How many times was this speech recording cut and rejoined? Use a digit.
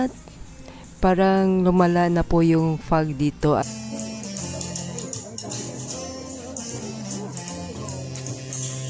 1